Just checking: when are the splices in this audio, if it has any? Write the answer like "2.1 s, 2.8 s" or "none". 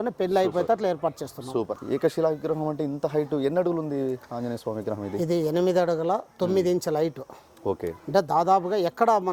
1.7 s